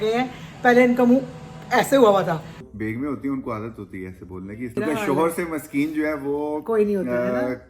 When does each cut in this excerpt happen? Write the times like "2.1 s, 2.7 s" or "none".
2.7 s, 4.8 s